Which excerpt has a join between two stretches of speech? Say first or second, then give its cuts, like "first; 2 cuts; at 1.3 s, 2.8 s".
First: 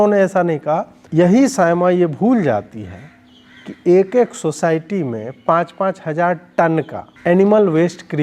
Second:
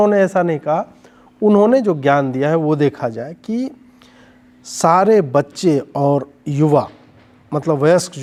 first; 2 cuts; at 1.0 s, 7.0 s